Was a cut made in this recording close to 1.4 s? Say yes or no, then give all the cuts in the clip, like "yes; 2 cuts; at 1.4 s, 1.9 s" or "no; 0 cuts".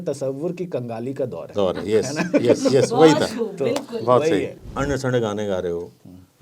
no; 1 cut; at 4.6 s